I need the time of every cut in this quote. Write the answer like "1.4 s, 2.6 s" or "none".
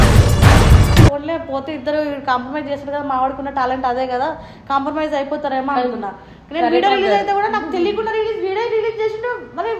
1.1 s